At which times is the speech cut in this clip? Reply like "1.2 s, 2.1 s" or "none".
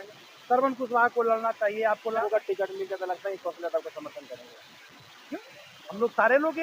2.1 s